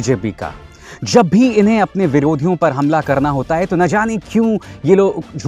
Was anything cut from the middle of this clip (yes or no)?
no